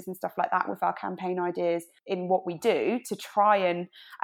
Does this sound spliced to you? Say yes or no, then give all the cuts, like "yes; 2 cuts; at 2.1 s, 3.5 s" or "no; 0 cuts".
yes; 1 cut; at 1.9 s